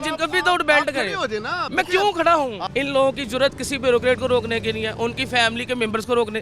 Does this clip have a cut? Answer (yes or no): yes